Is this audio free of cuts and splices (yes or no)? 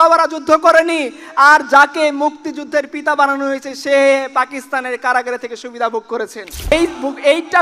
no